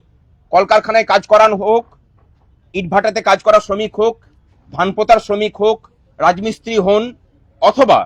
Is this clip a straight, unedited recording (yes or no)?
yes